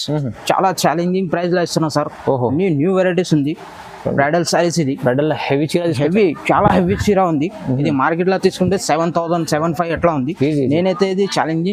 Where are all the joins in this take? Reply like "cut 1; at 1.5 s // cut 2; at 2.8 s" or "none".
none